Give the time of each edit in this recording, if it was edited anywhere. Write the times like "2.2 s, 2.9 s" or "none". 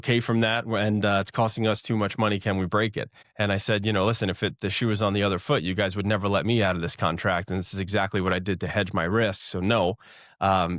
none